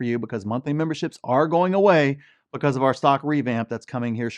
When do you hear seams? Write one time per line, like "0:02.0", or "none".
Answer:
none

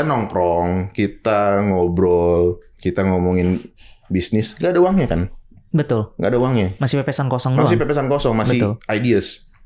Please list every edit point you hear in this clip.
none

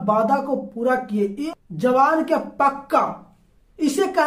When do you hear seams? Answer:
0:01.4

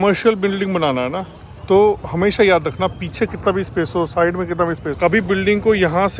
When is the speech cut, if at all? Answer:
0:05.0

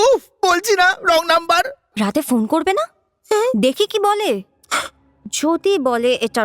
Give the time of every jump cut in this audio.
0:01.8

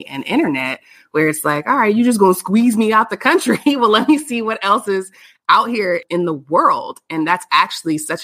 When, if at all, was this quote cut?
none

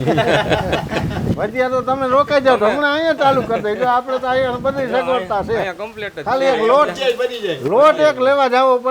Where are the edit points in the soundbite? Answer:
none

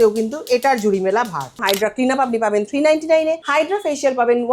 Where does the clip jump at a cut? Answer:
0:01.6
0:03.4

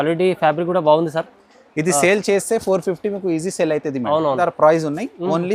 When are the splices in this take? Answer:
0:04.4

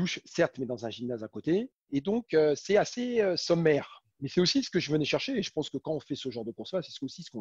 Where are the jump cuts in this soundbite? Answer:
0:01.8

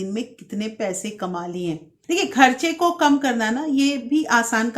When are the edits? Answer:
0:01.9

